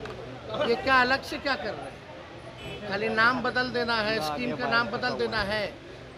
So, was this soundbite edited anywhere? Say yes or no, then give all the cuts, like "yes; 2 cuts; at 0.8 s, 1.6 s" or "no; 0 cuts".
no; 0 cuts